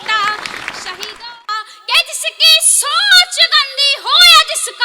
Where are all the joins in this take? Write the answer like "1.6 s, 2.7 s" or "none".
1.2 s